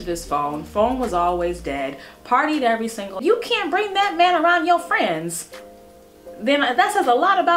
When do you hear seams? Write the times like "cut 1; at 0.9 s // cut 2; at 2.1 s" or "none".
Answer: cut 1; at 3.2 s

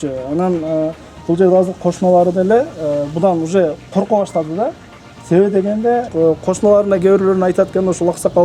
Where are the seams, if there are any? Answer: cut 1; at 6.1 s

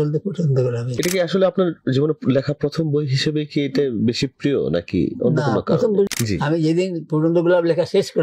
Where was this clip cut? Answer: cut 1; at 0.9 s // cut 2; at 6.1 s

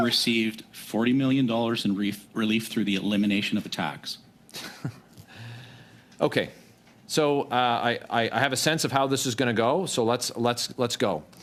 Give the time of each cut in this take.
none

